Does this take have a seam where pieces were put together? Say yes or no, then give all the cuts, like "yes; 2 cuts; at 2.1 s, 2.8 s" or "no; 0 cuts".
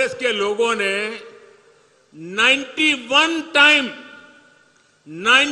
no; 0 cuts